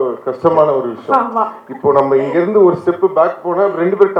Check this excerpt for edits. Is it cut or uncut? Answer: uncut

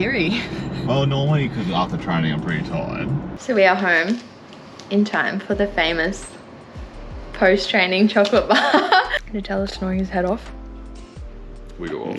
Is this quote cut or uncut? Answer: cut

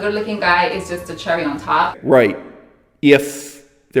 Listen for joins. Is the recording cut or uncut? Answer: cut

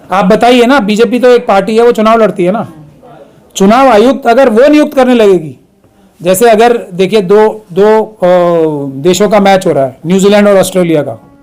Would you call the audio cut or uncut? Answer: uncut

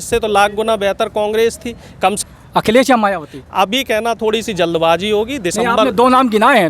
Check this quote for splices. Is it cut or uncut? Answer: cut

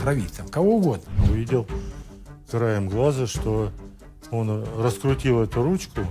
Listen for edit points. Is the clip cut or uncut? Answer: cut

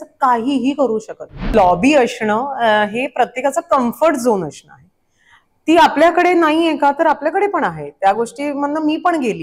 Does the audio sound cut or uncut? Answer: cut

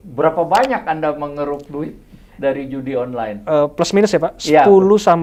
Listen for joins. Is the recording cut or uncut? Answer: uncut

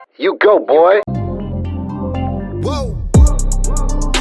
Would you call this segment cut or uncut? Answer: cut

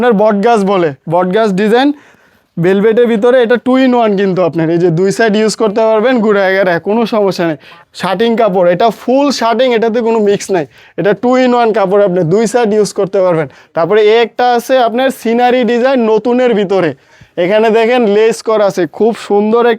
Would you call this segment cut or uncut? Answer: cut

